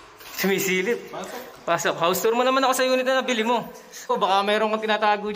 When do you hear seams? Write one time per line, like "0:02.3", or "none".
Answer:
0:04.1